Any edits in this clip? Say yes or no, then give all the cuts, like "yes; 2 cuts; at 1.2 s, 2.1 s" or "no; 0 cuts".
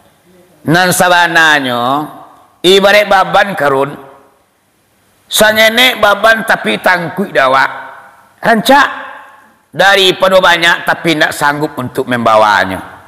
no; 0 cuts